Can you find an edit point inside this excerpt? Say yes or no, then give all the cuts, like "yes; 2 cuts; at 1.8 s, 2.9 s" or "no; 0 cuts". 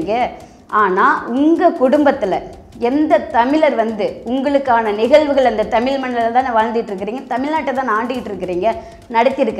no; 0 cuts